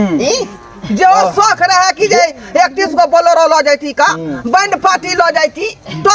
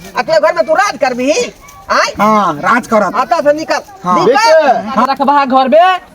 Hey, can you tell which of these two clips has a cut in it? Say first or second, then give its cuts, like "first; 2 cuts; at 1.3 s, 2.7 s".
second; 1 cut; at 5.1 s